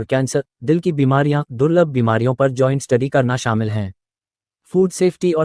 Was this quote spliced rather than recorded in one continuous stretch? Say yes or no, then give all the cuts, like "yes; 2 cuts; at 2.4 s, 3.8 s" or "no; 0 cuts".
yes; 1 cut; at 4.5 s